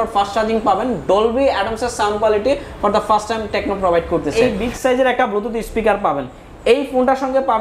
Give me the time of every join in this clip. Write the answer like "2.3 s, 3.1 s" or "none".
4.3 s